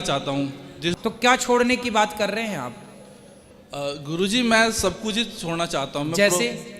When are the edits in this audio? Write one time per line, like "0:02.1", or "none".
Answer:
0:01.0